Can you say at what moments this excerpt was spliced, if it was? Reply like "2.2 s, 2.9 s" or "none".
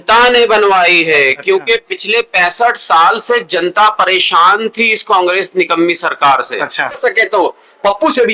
7.0 s